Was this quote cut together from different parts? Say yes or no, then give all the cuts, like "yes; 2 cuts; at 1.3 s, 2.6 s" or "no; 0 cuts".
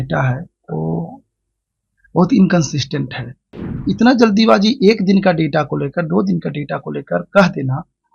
yes; 1 cut; at 3.8 s